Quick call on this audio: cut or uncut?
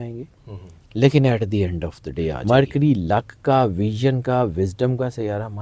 cut